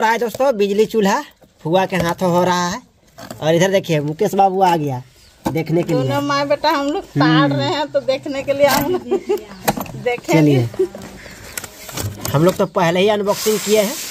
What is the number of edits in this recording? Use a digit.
0